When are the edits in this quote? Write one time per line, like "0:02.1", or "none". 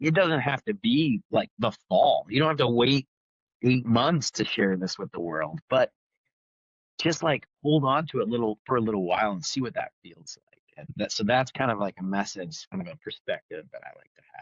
0:10.9
0:12.7